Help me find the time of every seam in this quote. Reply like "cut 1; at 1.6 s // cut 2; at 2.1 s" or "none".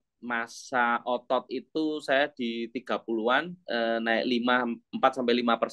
cut 1; at 3.6 s